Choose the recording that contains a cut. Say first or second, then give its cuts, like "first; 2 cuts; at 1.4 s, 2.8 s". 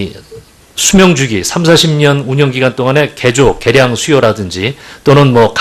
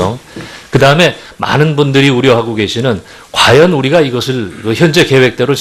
second; 1 cut; at 2.7 s